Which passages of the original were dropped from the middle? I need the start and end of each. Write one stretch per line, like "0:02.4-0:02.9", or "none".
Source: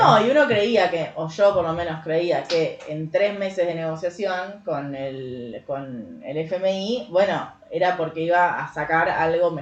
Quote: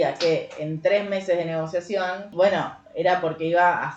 0:04.6-0:07.1